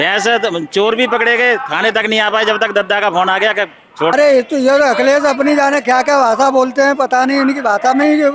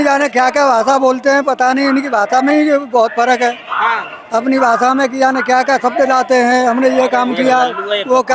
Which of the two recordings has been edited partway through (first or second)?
first